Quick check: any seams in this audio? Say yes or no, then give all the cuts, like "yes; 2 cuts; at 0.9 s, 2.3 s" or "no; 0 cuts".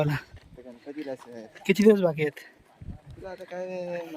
no; 0 cuts